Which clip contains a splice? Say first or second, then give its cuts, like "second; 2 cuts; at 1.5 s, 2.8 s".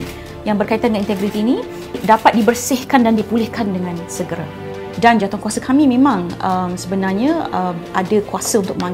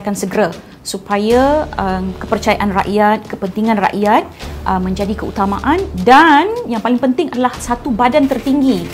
first; 2 cuts; at 2.0 s, 4.8 s